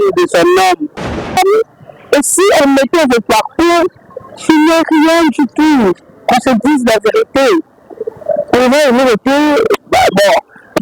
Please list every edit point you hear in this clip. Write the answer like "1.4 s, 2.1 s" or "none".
1.2 s